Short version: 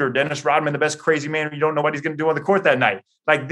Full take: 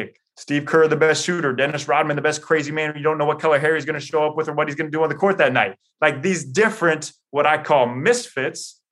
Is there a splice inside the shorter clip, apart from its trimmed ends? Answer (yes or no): yes